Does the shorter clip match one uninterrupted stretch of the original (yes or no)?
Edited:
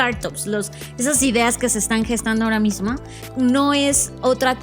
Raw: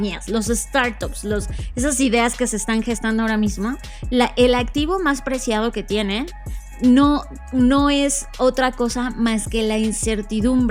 no